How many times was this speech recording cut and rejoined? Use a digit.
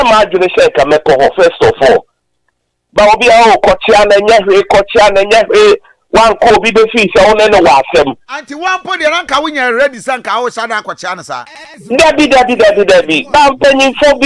0